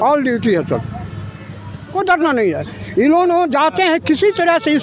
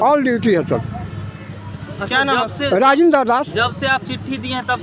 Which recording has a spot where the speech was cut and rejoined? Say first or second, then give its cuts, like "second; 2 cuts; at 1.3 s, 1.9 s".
first; 1 cut; at 1.9 s